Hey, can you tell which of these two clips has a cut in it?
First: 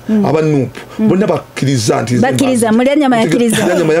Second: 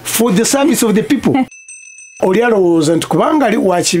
second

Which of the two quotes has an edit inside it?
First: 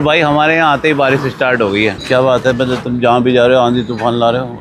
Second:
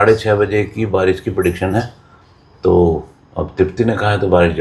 first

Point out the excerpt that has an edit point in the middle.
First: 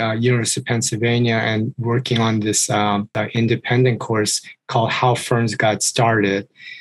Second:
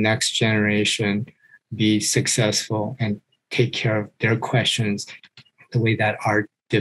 first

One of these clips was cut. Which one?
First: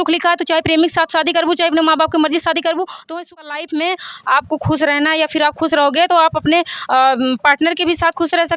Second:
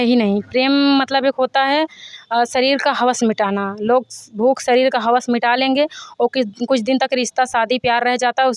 first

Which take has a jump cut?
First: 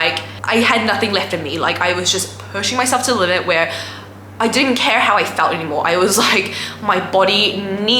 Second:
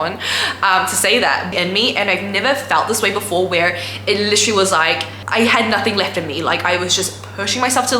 second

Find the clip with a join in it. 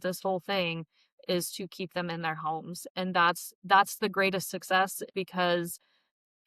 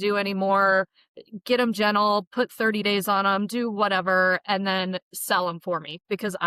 first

